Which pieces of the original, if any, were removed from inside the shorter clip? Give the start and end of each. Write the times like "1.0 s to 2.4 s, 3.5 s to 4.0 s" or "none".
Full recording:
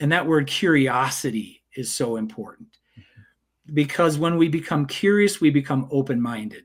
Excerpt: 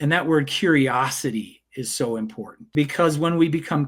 2.6 s to 3.6 s